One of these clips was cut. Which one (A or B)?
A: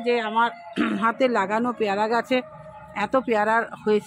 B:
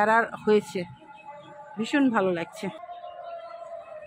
B